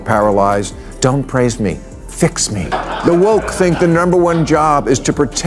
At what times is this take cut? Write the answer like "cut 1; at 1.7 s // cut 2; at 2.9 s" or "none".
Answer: cut 1; at 2.7 s